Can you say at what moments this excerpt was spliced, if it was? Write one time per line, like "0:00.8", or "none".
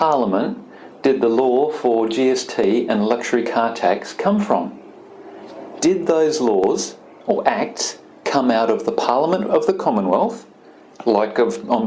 none